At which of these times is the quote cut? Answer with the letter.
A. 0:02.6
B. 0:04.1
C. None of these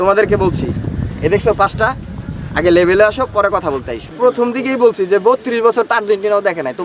C